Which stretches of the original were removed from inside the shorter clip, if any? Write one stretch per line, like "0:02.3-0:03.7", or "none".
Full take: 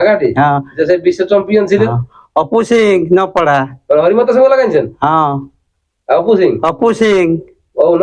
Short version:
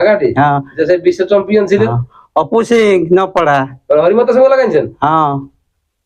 none